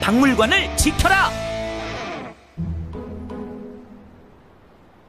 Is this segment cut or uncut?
uncut